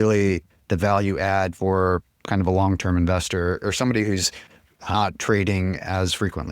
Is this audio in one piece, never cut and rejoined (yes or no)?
no